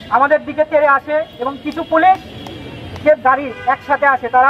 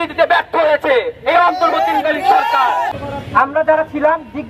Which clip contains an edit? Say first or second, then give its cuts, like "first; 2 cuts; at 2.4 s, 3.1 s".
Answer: second; 1 cut; at 2.9 s